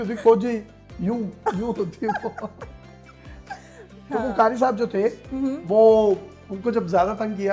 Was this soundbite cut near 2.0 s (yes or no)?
no